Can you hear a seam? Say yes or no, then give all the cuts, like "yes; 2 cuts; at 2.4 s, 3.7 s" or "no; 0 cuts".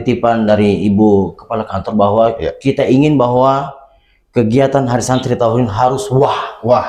no; 0 cuts